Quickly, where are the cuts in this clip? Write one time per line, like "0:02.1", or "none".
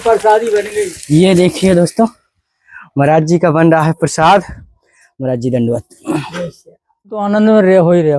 0:07.1